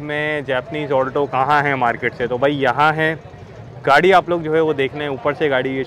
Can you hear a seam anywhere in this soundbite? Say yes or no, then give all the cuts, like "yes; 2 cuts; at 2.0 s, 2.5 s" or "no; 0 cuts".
no; 0 cuts